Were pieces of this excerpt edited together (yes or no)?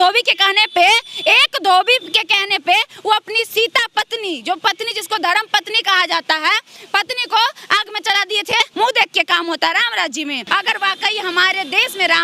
yes